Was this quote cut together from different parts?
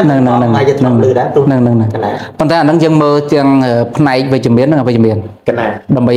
no; 0 cuts

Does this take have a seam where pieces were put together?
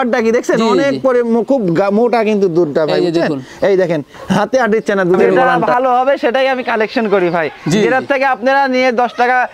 yes; 1 cut; at 5.5 s

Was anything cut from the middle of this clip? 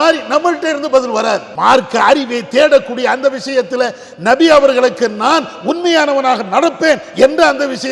yes; 1 cut; at 1.5 s

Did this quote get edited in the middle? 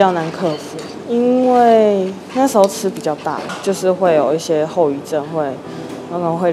yes; 1 cut; at 3.5 s

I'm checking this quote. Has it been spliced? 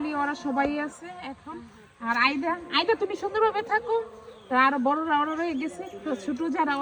no; 0 cuts

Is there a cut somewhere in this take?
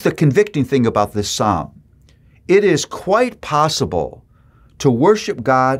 no; 0 cuts

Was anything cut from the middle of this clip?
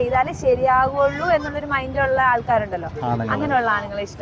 no; 0 cuts

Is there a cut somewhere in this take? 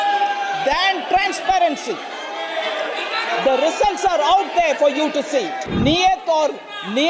yes; 1 cut; at 5.6 s

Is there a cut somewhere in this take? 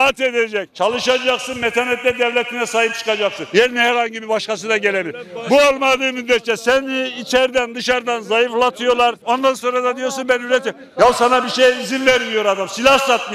no; 0 cuts

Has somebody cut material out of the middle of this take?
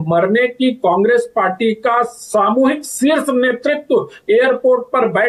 no; 0 cuts

